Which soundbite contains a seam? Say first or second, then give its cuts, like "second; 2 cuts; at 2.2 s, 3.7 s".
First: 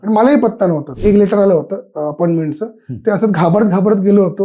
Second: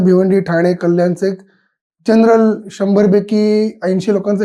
first; 1 cut; at 1.0 s